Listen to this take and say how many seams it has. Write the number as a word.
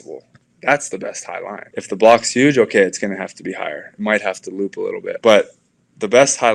two